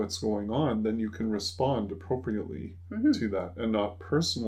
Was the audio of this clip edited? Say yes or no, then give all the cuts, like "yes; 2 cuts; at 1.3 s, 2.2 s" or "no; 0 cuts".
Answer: no; 0 cuts